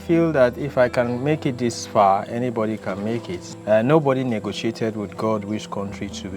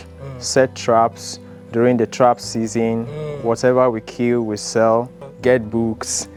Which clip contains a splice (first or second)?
first